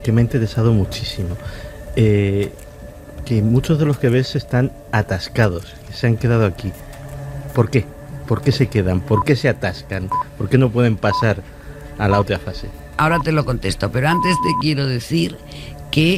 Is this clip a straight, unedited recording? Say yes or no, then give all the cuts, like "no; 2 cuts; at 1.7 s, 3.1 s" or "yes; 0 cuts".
yes; 0 cuts